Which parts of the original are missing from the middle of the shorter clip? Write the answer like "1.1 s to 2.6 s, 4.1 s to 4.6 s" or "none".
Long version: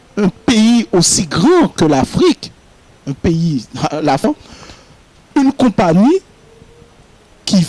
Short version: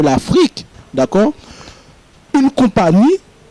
3.0 s to 4.2 s